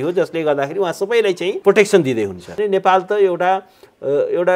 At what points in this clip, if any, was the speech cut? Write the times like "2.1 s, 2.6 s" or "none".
1.6 s, 2.6 s